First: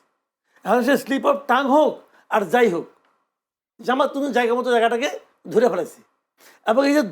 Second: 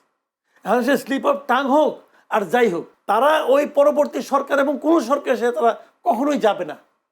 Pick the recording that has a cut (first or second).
second